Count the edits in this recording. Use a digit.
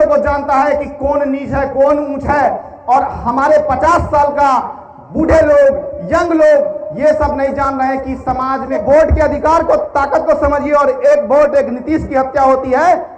1